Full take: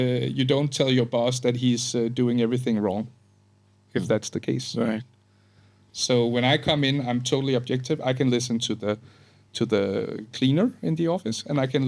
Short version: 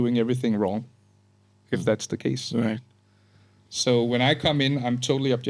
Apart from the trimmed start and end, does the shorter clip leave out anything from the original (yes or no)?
no